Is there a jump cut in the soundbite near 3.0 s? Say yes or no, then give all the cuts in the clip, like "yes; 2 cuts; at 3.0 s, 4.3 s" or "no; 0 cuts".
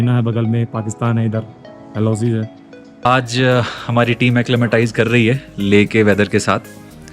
yes; 1 cut; at 3.0 s